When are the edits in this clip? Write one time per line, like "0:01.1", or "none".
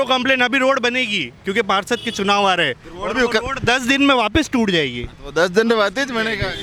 none